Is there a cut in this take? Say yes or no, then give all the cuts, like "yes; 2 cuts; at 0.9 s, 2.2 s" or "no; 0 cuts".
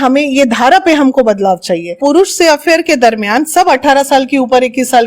yes; 1 cut; at 1.9 s